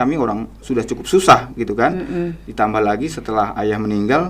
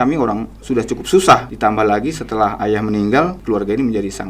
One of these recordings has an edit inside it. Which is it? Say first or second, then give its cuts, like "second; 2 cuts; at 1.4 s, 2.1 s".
second; 2 cuts; at 1.5 s, 3.4 s